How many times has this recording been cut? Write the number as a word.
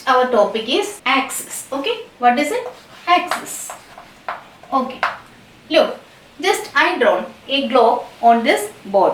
one